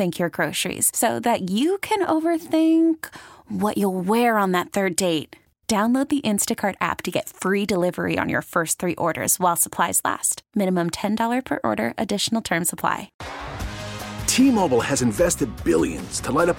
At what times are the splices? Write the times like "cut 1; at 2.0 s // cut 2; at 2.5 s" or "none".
cut 1; at 13.2 s